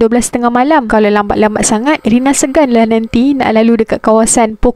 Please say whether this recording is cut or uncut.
uncut